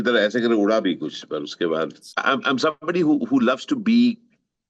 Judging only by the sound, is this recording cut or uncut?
cut